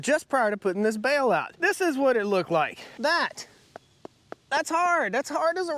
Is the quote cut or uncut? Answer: cut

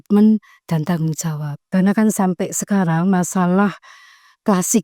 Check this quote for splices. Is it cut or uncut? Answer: cut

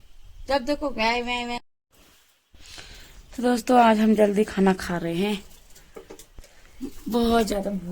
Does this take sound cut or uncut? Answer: cut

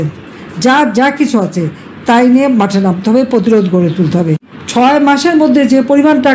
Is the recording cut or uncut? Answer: cut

